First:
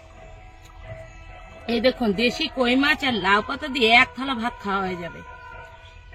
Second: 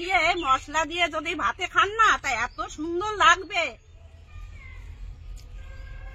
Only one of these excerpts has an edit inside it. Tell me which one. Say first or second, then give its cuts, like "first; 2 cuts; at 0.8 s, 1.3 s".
second; 1 cut; at 3.9 s